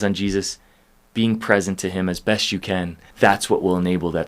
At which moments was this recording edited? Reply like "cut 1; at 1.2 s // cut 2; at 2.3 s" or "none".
cut 1; at 3.0 s